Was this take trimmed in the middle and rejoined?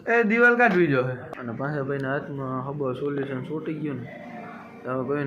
yes; 1 cut; at 1.3 s

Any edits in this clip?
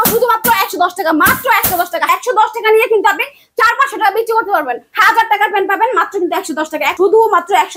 yes; 3 cuts; at 2.1 s, 4.8 s, 6.9 s

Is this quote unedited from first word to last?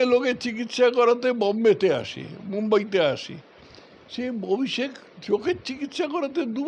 yes; 0 cuts

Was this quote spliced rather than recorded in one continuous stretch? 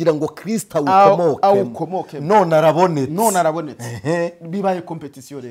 no; 0 cuts

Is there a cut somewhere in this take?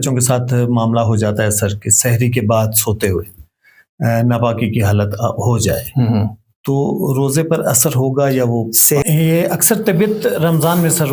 yes; 1 cut; at 9.0 s

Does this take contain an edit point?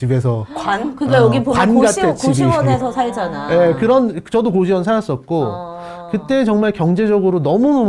no; 0 cuts

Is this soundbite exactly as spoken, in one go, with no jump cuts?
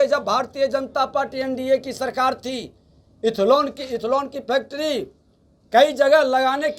yes; 0 cuts

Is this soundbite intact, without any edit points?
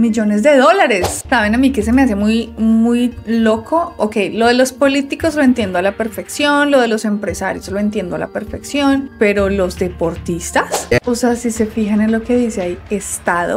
no; 2 cuts; at 1.1 s, 10.9 s

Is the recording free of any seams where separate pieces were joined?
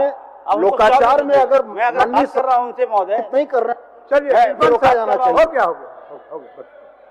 yes; 0 cuts

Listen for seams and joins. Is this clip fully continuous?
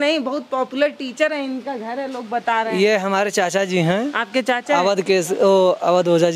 yes; 0 cuts

